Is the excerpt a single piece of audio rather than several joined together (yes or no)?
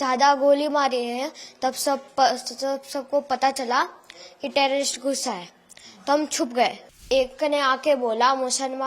no